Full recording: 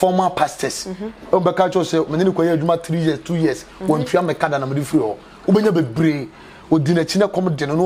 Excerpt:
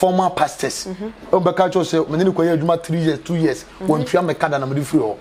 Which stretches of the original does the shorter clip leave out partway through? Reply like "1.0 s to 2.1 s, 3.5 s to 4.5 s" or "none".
none